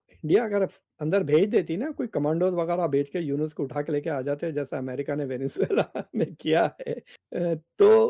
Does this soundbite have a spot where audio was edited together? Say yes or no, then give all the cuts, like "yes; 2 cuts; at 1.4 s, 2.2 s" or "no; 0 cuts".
no; 0 cuts